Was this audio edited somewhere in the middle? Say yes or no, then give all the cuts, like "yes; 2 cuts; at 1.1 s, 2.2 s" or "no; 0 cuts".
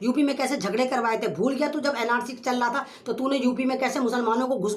no; 0 cuts